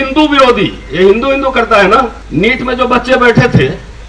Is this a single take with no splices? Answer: no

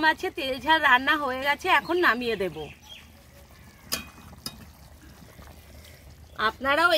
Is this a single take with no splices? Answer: yes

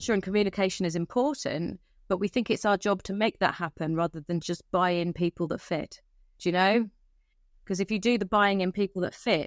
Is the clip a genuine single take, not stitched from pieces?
yes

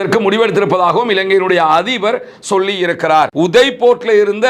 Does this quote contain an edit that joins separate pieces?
yes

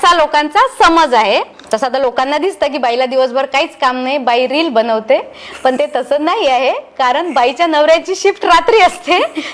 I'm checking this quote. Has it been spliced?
yes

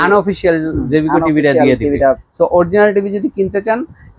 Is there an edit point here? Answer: yes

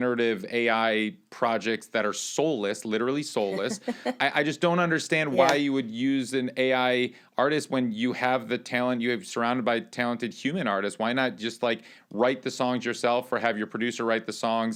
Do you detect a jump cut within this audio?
no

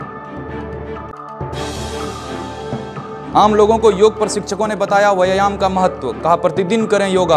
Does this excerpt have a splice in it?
yes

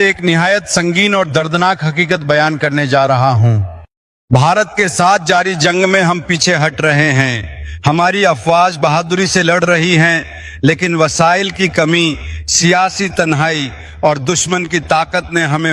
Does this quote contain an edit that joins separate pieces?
no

